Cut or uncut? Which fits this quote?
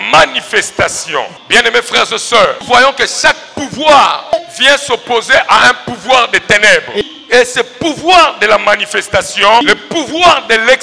cut